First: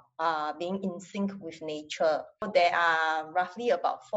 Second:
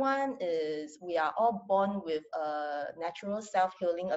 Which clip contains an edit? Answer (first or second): first